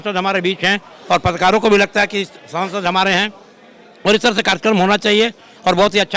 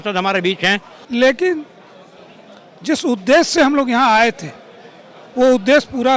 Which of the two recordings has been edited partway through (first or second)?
second